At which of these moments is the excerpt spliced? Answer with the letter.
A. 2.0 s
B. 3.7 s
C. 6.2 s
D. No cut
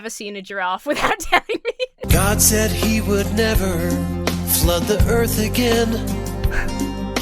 A